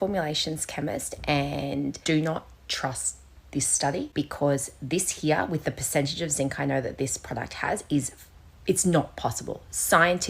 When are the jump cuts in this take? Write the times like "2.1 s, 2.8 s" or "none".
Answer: 2.0 s, 4.1 s